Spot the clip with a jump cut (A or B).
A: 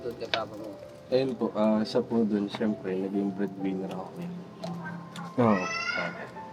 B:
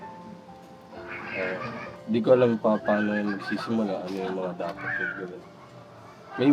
B